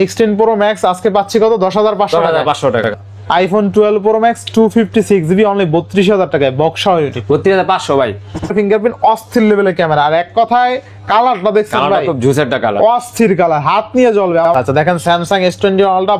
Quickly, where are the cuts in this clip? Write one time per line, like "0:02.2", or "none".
0:03.0
0:08.5
0:14.5

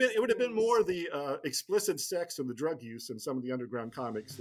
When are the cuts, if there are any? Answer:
none

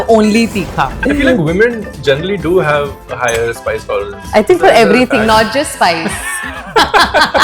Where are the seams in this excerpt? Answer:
0:01.0

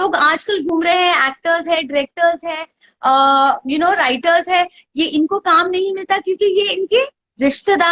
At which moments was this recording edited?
none

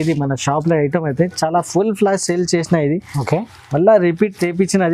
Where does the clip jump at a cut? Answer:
none

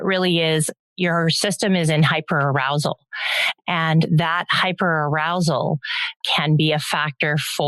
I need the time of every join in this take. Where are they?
0:06.2

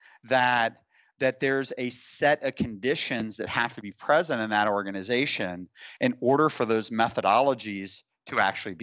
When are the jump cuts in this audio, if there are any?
none

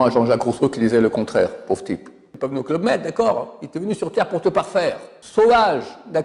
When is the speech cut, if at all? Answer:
0:02.3
0:05.2

